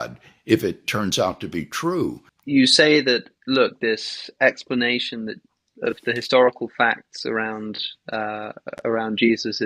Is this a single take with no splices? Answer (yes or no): no